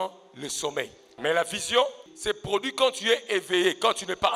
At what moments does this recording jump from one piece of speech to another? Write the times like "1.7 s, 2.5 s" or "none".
1.2 s, 2.1 s

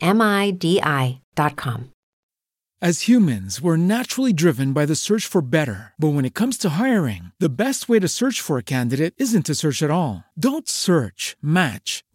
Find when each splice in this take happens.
2.3 s

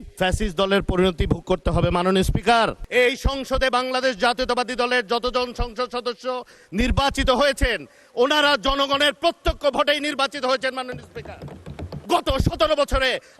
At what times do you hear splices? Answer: 2.8 s, 11.9 s

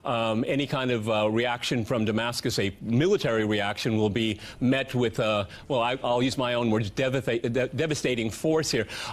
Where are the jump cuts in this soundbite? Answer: 7.8 s

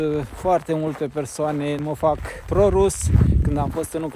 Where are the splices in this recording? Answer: 2.3 s

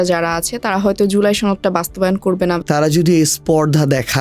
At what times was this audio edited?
2.6 s

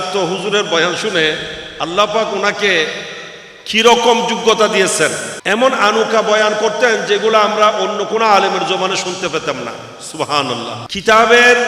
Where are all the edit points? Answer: 5.3 s, 10.8 s

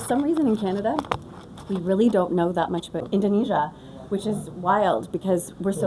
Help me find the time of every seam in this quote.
none

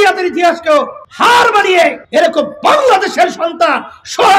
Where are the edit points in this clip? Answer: 1.0 s, 2.0 s

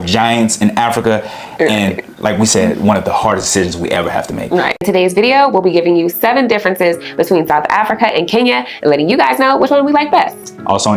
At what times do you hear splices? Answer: none

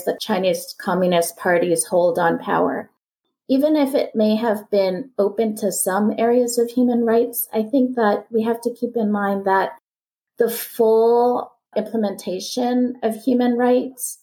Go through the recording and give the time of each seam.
3.2 s

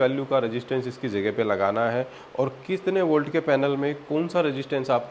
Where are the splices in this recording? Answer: none

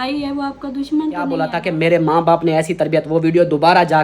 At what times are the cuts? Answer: 1.5 s

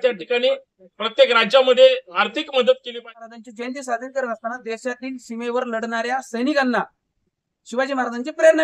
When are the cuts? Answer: 3.1 s

